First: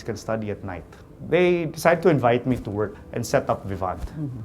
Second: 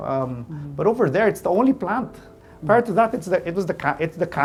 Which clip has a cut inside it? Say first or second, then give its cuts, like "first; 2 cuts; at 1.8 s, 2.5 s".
first; 2 cuts; at 1.0 s, 3.1 s